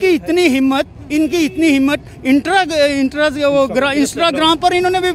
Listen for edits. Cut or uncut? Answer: uncut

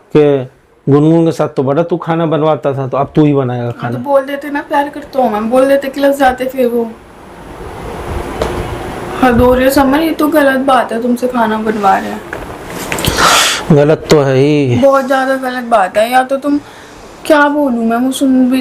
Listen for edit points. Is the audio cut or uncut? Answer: uncut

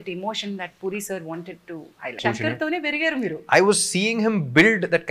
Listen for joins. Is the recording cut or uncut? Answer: cut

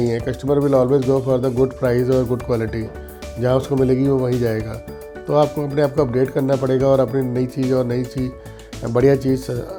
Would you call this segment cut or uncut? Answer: uncut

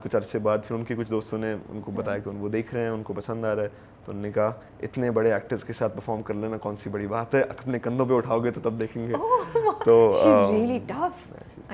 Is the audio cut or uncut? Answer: uncut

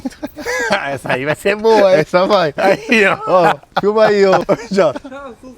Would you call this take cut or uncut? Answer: cut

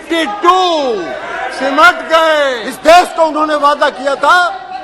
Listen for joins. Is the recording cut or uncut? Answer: cut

